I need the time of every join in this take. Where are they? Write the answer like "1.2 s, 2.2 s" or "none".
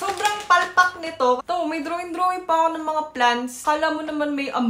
1.4 s, 3.6 s